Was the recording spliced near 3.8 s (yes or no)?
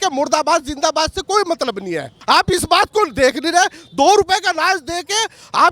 no